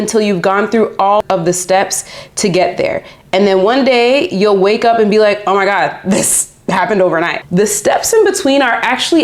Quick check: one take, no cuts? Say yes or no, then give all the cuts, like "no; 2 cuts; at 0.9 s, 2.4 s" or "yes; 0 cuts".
no; 2 cuts; at 1.2 s, 7.4 s